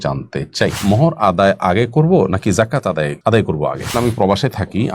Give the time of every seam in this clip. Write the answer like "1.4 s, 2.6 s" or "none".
0.8 s, 3.1 s, 3.9 s